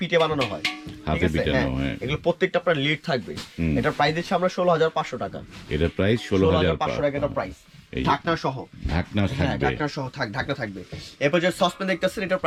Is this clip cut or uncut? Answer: uncut